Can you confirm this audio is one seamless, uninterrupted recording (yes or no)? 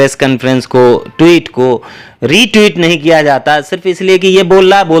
yes